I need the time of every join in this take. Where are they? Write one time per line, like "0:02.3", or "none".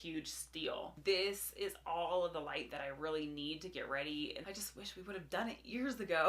0:00.9
0:04.4